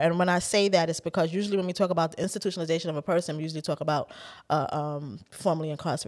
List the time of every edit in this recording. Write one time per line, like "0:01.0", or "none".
0:02.2

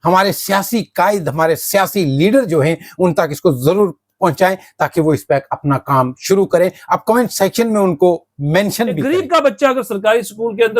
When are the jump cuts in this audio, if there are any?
0:09.0

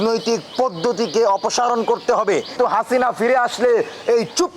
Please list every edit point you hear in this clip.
0:02.6

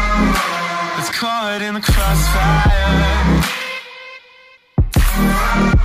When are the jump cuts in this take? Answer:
0:01.0

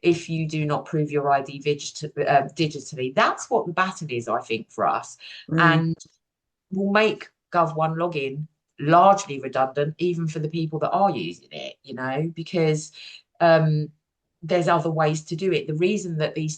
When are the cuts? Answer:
none

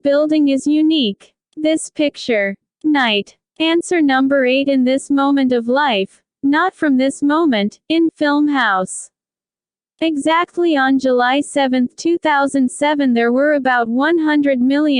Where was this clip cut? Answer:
0:00.9

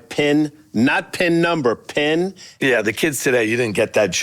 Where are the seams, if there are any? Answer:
0:02.6

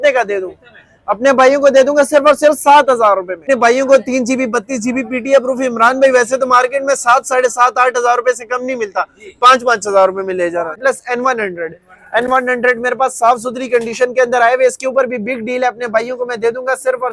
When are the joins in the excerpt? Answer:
0:03.4
0:10.8

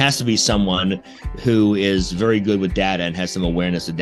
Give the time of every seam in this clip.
none

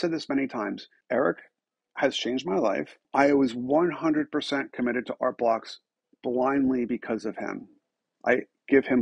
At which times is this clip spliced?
0:00.9
0:03.0

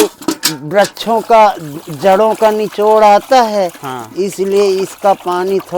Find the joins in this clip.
none

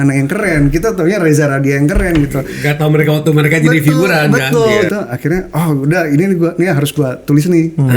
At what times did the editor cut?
0:04.9

